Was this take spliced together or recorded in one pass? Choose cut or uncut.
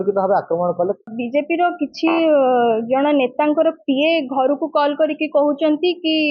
cut